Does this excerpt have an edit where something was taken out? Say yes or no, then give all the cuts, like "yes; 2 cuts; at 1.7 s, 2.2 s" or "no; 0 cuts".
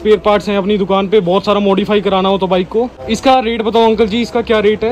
yes; 1 cut; at 3.1 s